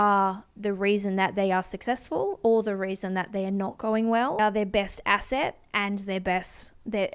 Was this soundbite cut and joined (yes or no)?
yes